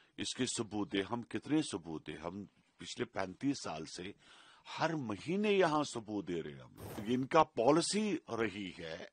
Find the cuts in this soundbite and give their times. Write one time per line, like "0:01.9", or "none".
0:06.9